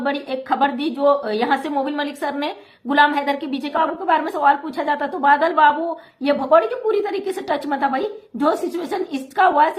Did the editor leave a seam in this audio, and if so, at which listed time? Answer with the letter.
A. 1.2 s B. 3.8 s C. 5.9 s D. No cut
B